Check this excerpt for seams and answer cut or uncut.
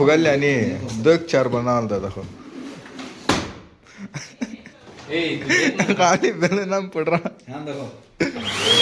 uncut